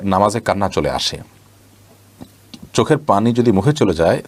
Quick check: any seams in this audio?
no; 0 cuts

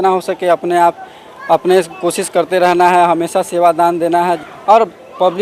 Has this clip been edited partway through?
yes; 1 cut; at 4.5 s

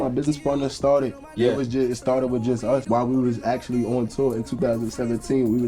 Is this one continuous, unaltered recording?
no; 1 cut; at 2.9 s

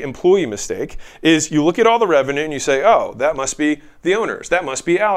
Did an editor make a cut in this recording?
no; 0 cuts

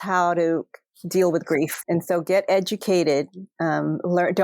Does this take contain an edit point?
yes; 1 cut; at 1.8 s

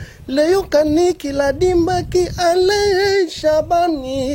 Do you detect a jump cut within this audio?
no; 0 cuts

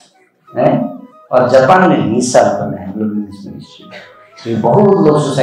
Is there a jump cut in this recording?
no; 0 cuts

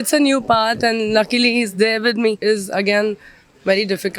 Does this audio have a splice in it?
yes; 1 cut; at 2.4 s

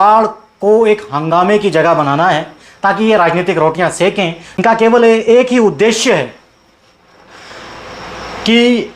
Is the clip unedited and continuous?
no; 1 cut; at 4.6 s

